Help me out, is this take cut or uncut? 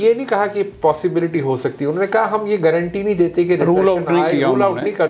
uncut